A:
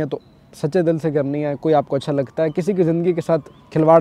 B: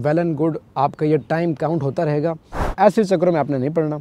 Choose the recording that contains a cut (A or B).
B